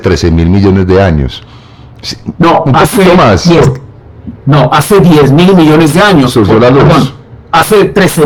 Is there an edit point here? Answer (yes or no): no